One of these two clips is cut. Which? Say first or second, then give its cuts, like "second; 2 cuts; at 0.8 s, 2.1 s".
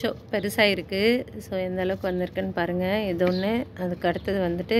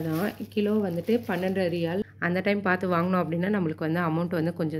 second; 1 cut; at 2.0 s